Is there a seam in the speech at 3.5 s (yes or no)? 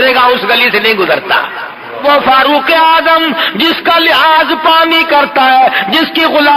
no